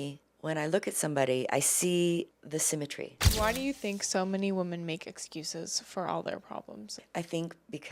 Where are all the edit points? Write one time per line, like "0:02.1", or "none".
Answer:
0:03.2
0:07.0